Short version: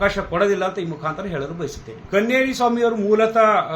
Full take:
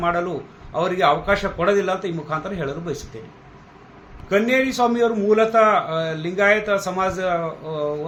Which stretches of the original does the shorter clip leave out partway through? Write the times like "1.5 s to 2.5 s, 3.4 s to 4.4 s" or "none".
3.2 s to 4.1 s